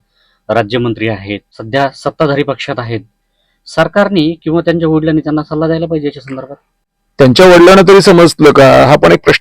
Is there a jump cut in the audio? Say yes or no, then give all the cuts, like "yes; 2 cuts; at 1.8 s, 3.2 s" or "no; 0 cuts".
yes; 1 cut; at 1.5 s